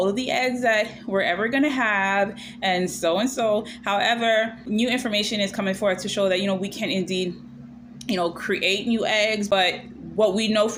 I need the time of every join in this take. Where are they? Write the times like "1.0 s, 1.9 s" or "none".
none